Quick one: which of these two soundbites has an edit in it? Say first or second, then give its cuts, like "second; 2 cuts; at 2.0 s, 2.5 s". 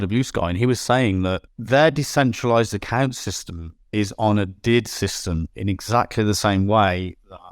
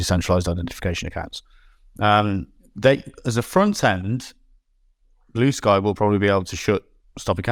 first; 1 cut; at 1.5 s